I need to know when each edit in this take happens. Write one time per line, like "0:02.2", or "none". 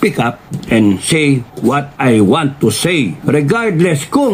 0:03.2